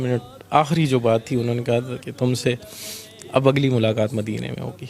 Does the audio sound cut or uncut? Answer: uncut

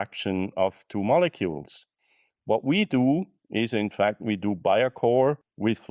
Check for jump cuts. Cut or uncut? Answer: uncut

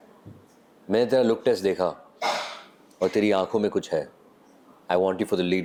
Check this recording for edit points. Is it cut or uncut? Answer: uncut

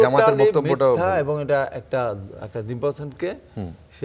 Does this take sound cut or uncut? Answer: uncut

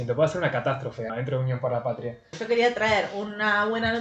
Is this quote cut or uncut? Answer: cut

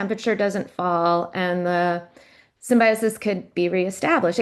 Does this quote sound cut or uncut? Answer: uncut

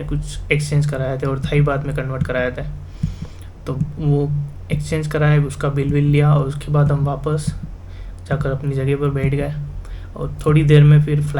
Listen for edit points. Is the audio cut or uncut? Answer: uncut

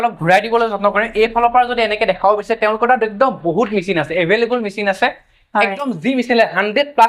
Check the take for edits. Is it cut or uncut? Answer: uncut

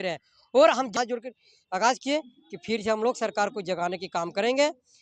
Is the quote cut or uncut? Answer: cut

